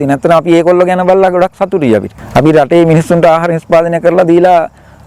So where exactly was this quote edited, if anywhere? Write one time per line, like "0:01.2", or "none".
0:02.2